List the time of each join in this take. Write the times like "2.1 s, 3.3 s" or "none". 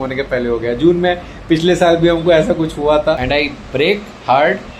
3.2 s